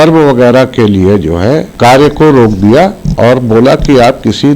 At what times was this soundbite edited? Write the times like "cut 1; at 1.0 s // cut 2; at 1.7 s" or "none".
cut 1; at 1.7 s